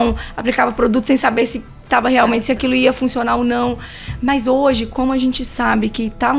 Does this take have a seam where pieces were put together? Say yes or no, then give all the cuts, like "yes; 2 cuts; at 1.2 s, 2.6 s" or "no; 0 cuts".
no; 0 cuts